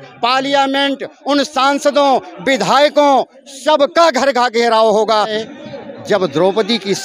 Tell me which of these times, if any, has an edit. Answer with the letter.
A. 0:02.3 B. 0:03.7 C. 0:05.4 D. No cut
C